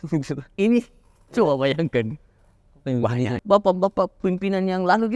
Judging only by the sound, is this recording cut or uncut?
cut